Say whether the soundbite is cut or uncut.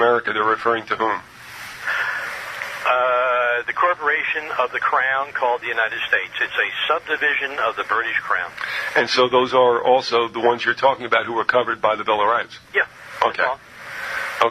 uncut